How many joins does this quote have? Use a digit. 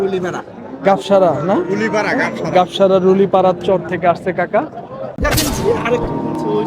1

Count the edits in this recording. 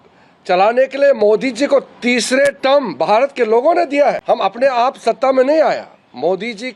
1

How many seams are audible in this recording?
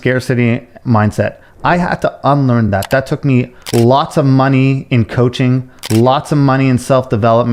0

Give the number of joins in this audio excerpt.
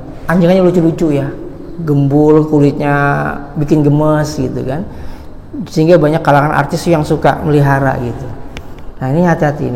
0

